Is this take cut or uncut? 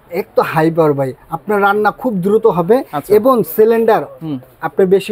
uncut